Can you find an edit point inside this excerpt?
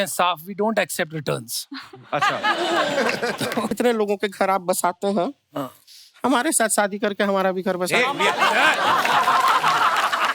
yes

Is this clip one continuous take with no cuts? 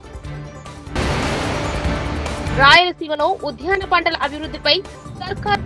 no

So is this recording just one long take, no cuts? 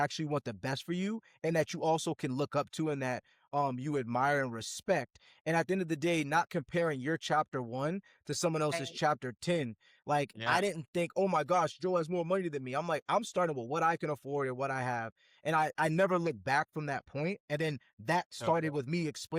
yes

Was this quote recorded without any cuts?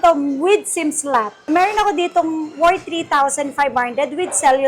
no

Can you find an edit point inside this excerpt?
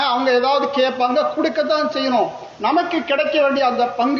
no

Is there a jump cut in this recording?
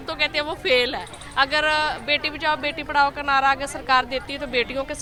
no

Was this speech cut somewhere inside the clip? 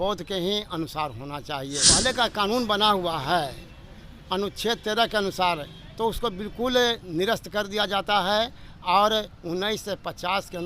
yes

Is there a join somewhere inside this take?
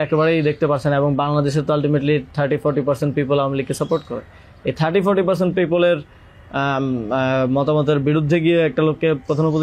no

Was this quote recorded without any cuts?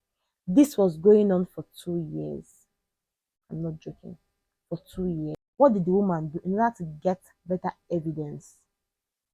no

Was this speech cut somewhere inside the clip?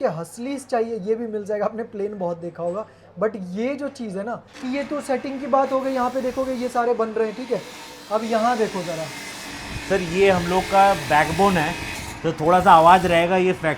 yes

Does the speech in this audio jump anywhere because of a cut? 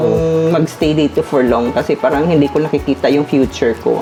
no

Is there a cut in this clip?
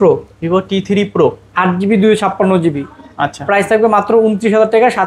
no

